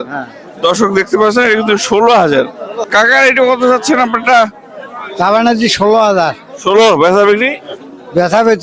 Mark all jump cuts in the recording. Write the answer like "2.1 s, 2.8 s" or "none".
2.7 s